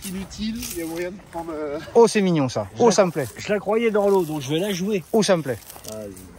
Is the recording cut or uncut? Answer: uncut